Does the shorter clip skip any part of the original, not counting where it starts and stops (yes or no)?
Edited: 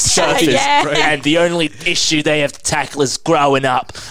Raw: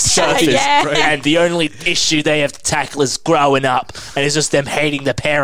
no